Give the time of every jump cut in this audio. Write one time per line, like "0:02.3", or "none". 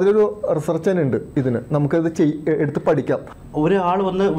0:03.3